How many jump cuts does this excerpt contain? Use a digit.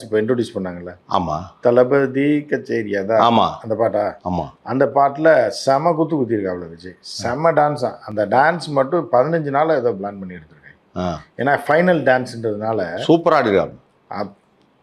0